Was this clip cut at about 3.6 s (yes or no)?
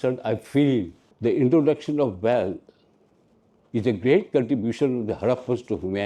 no